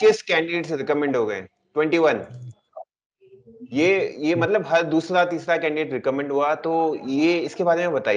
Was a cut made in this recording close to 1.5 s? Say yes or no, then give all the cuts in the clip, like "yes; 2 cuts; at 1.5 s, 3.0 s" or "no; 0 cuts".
no; 0 cuts